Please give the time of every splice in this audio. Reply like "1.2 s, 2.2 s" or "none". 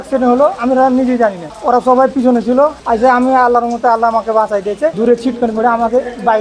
1.5 s, 2.8 s, 4.9 s